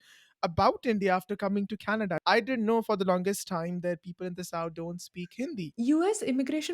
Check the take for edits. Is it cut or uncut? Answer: cut